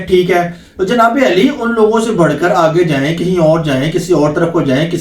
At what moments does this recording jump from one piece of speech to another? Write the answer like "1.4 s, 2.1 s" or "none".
none